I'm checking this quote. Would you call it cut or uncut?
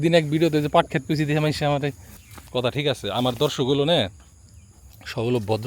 cut